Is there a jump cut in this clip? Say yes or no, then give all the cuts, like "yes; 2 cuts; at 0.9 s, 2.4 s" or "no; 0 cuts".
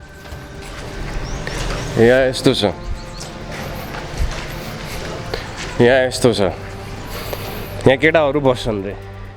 no; 0 cuts